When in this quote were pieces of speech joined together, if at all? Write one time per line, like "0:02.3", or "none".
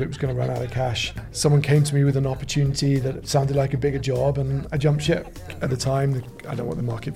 0:01.2
0:05.5